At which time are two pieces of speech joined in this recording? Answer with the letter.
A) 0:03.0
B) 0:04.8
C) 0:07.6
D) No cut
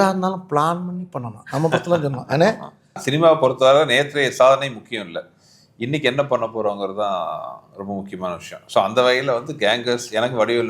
A